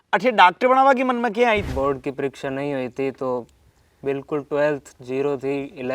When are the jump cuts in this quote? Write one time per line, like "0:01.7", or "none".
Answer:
0:01.7